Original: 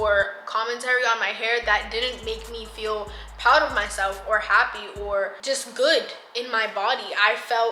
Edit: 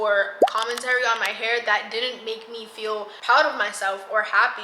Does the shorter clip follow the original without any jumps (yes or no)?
no